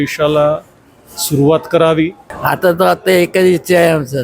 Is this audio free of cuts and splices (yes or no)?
no